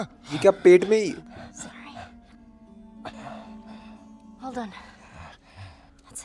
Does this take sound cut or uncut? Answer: uncut